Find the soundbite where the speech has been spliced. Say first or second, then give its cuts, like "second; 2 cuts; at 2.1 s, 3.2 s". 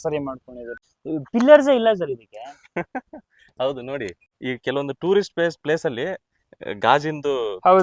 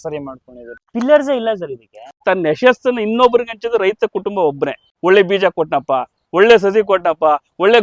second; 3 cuts; at 0.9 s, 2.2 s, 4.9 s